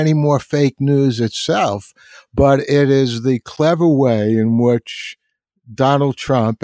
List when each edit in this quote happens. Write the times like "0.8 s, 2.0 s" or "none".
none